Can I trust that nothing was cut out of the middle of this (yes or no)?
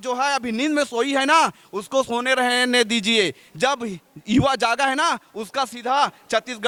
yes